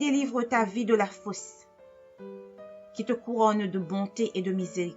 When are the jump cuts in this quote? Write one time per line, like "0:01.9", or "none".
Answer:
0:01.4
0:02.9